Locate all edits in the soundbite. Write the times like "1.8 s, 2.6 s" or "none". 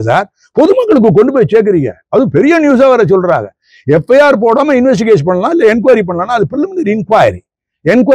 none